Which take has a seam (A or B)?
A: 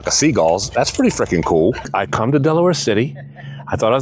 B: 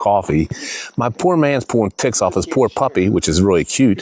A